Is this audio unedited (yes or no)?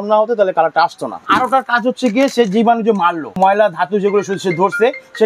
no